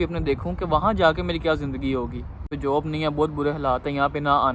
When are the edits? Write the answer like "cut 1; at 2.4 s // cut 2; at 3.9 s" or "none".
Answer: cut 1; at 2.5 s